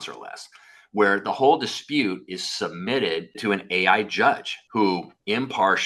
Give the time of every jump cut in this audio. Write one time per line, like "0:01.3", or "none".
0:03.4